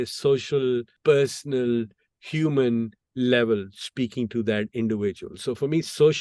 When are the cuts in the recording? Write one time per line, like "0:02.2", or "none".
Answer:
0:00.9